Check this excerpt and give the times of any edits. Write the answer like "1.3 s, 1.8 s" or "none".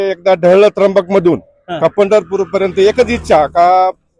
none